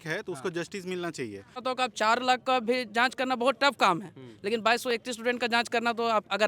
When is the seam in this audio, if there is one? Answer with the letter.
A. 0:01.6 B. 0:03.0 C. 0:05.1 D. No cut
A